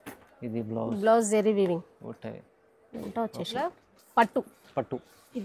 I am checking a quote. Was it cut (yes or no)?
yes